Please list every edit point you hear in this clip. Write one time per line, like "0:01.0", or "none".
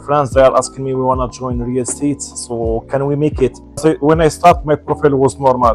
0:03.8